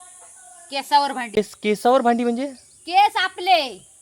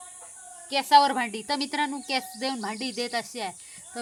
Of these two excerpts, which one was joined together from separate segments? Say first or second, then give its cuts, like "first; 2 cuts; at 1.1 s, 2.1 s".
first; 1 cut; at 1.4 s